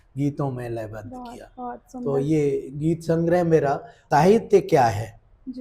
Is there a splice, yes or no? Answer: yes